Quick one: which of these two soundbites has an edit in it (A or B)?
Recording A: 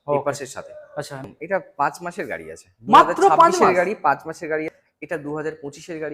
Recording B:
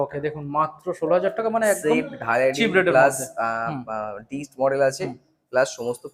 A